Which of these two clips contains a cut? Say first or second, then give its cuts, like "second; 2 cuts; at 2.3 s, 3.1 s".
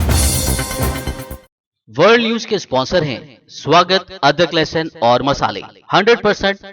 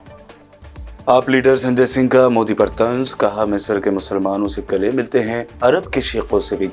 first; 1 cut; at 1.4 s